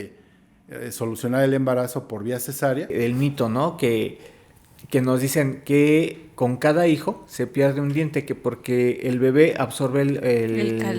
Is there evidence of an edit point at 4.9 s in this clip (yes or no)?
no